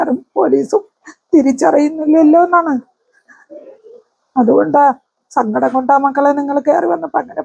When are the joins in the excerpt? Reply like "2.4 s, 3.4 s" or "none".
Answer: none